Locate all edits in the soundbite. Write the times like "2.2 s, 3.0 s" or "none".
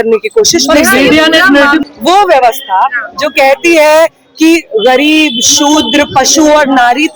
1.8 s